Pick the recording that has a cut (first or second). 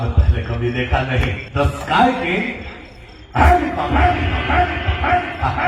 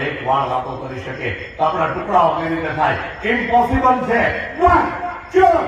first